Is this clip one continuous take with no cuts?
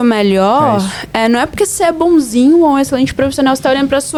yes; 0 cuts

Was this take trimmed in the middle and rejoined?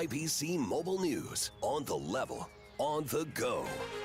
no; 0 cuts

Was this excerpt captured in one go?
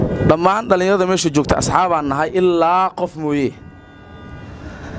yes; 0 cuts

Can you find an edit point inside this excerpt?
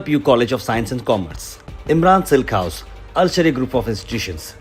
no; 0 cuts

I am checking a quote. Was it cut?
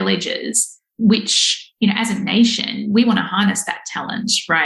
no; 0 cuts

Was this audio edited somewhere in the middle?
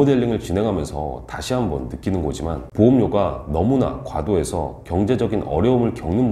yes; 1 cut; at 2.6 s

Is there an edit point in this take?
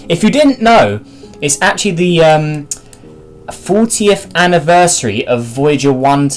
yes; 1 cut; at 4.8 s

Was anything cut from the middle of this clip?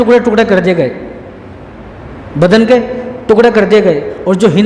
no; 0 cuts

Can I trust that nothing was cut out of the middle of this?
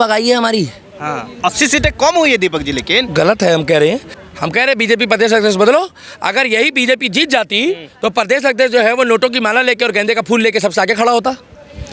no; 1 cut; at 4.1 s

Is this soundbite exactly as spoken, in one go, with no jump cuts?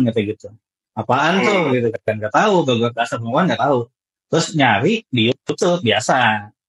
yes; 0 cuts

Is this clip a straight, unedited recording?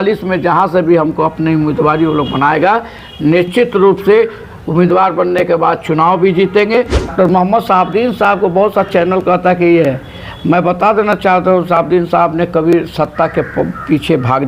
no; 1 cut; at 7.1 s

